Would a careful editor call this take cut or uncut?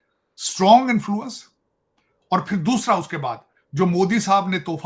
uncut